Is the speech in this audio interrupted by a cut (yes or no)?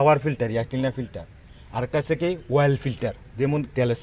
no